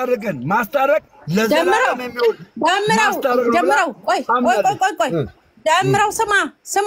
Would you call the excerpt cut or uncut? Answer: uncut